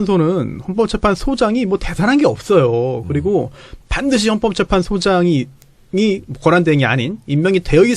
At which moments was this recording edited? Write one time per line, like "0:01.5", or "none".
0:06.4